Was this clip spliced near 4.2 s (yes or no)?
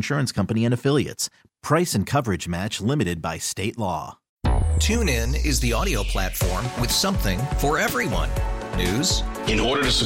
yes